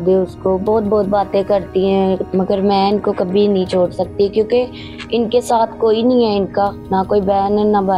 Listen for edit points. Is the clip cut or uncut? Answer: cut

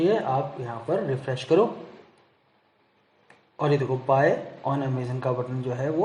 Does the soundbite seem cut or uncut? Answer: uncut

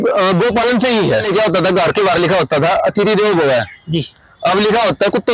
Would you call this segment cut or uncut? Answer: cut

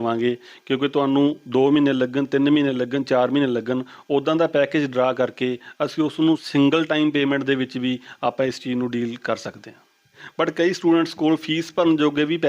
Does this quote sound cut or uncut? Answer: cut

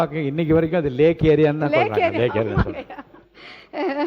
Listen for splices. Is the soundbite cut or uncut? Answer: uncut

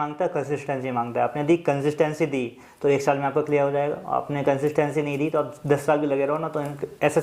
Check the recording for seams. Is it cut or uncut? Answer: uncut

